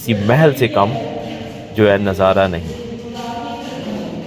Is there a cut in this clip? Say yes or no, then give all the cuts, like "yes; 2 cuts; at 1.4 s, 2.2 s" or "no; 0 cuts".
no; 0 cuts